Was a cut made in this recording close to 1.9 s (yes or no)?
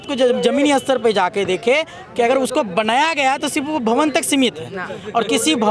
no